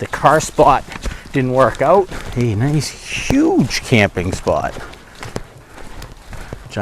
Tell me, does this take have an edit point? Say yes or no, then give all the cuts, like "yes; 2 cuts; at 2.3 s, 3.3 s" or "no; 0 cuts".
yes; 1 cut; at 2.2 s